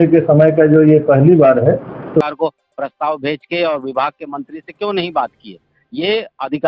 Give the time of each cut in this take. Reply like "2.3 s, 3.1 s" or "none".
2.2 s